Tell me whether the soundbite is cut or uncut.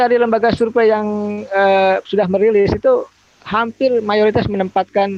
uncut